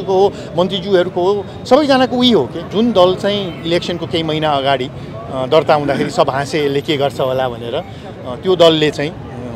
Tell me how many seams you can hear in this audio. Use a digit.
1